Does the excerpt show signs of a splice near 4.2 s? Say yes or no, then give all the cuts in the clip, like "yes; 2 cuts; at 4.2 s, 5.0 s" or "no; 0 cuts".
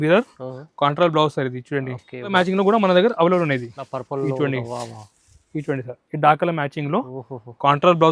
no; 1 cut; at 2.3 s